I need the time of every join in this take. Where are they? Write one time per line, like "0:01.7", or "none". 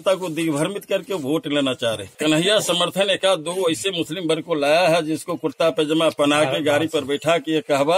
0:02.2